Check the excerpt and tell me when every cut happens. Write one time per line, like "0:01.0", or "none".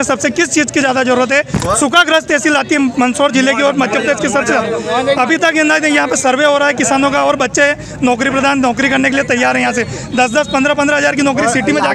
none